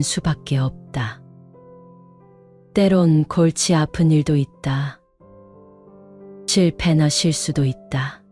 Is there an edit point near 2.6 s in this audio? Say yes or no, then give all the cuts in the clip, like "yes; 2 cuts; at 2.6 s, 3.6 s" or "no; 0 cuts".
yes; 2 cuts; at 1.1 s, 2.6 s